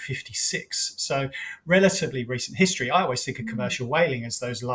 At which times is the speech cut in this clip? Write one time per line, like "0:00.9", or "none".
none